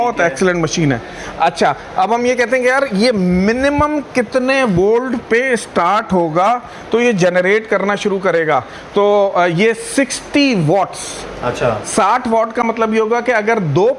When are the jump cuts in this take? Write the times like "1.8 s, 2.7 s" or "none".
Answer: none